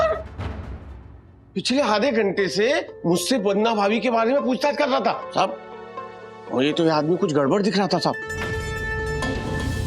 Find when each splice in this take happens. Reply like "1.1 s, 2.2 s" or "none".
5.2 s